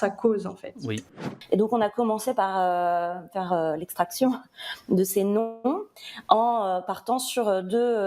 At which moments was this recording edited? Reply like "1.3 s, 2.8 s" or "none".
1.1 s